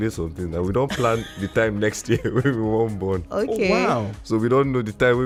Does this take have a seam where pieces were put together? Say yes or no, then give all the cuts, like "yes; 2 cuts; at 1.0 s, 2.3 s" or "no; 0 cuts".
no; 0 cuts